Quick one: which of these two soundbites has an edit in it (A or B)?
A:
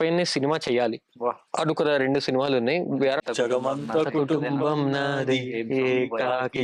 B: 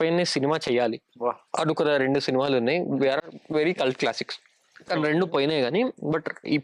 A